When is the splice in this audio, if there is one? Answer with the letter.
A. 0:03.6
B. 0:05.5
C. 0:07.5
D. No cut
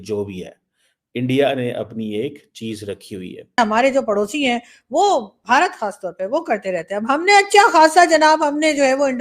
A